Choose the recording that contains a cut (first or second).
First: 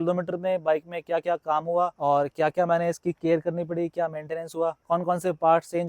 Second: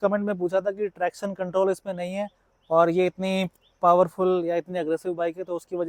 first